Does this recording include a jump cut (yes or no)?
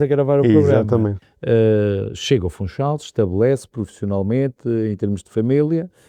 yes